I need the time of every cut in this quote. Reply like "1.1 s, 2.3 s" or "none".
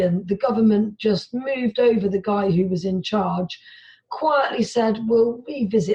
none